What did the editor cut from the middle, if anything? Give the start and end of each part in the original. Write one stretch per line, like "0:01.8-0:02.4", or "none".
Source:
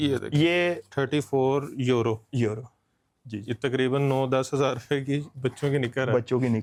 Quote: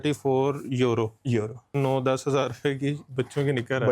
0:02.8-0:04.0